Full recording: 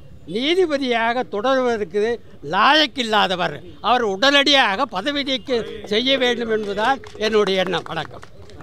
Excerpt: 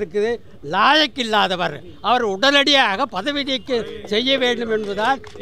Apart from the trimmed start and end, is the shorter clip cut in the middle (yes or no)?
no